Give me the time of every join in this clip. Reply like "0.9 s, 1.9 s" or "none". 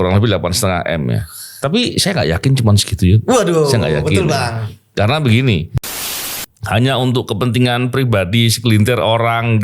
5.9 s